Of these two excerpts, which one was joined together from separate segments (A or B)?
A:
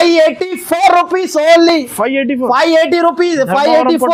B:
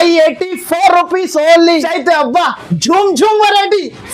B